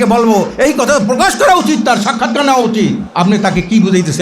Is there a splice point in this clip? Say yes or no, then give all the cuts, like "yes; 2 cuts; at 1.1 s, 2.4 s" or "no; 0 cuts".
yes; 1 cut; at 3.0 s